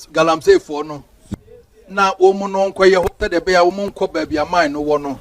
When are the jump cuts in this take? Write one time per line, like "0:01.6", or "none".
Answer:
0:01.2